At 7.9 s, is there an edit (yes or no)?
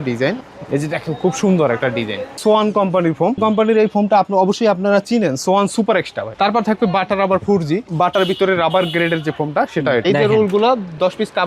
yes